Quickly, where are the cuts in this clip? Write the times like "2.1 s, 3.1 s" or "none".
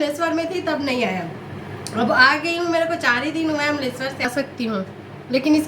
4.2 s

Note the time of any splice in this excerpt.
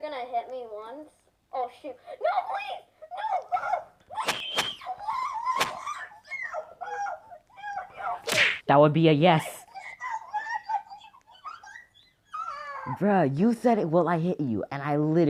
none

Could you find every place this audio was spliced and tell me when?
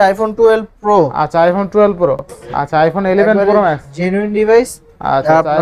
2.4 s

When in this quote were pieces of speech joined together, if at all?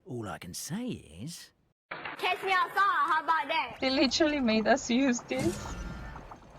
3.7 s

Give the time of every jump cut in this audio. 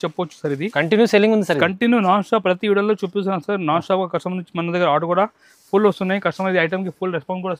none

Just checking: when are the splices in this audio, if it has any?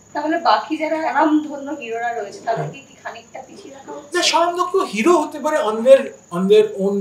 1.0 s

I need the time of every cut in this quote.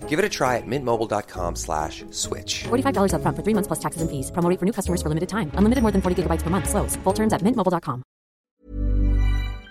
8.5 s

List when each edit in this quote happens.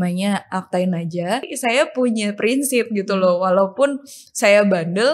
1.5 s

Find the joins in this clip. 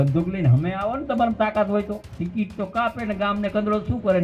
2.1 s

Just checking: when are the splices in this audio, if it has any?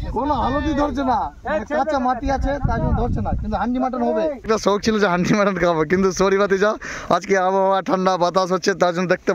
4.4 s

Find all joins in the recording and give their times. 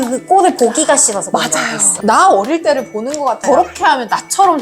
3.4 s

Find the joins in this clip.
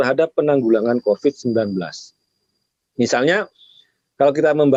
none

